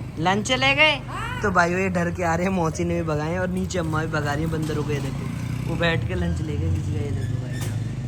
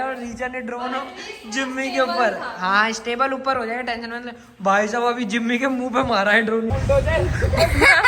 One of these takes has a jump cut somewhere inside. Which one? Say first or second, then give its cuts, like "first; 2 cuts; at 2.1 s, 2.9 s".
second; 1 cut; at 6.7 s